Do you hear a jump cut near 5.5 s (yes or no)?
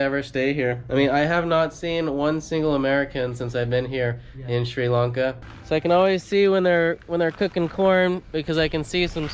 yes